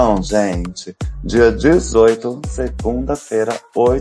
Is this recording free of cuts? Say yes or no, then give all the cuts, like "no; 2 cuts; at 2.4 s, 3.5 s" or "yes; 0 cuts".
no; 1 cut; at 1.0 s